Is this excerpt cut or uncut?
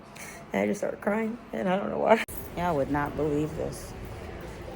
cut